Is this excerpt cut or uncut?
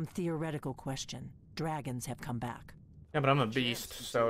uncut